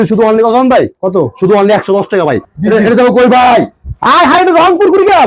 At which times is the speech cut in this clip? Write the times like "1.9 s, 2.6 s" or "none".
2.5 s